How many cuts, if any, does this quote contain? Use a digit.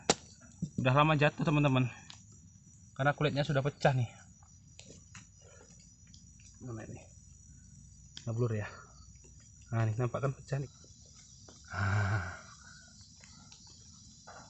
1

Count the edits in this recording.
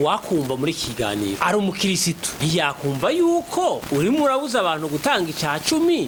0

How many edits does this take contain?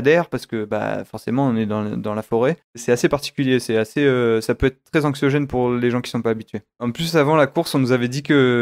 2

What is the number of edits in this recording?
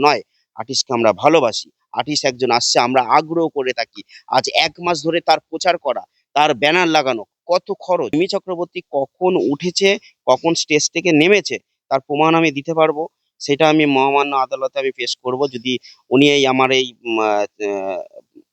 1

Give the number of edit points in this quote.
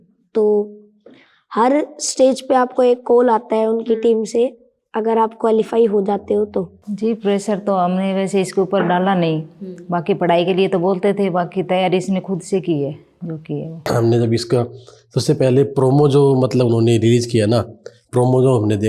2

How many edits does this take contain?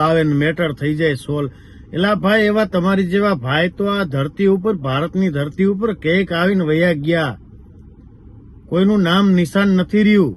0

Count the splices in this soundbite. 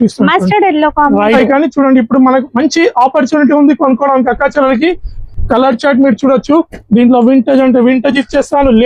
2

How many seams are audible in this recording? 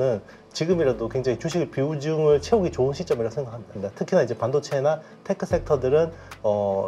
1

